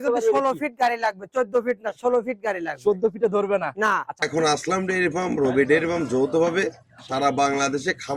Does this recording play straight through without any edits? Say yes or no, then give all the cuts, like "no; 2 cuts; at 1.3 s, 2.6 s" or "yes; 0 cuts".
no; 1 cut; at 4.2 s